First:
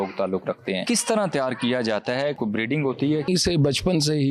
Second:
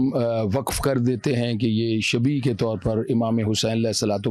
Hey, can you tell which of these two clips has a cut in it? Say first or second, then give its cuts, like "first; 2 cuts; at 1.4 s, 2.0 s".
first; 3 cuts; at 0.8 s, 2.4 s, 3.3 s